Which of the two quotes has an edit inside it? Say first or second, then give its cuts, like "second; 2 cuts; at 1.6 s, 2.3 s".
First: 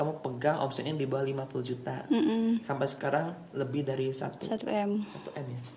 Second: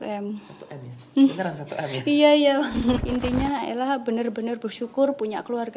second; 1 cut; at 3.0 s